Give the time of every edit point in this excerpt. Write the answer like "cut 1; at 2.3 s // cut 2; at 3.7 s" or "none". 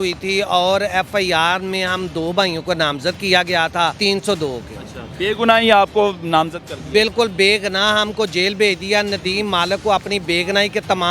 cut 1; at 4.0 s